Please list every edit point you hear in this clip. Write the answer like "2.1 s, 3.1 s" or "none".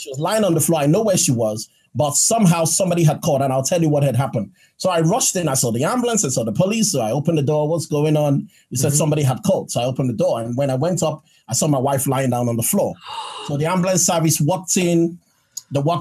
none